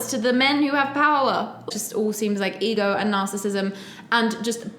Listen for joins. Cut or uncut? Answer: cut